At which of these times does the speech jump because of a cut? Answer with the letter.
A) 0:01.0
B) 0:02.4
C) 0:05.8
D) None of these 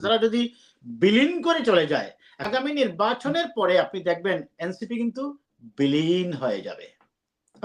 B